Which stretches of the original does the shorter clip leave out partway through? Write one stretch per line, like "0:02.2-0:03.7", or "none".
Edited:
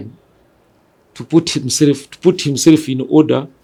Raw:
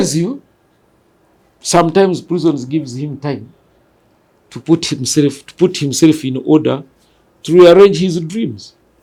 none

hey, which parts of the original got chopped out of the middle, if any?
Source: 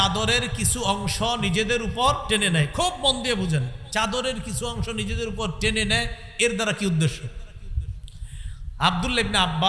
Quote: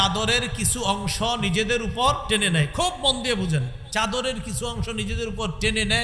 none

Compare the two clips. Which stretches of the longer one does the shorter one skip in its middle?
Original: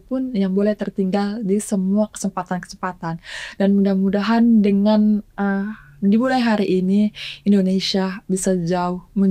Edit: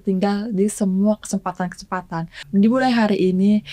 0:03.2-0:05.8

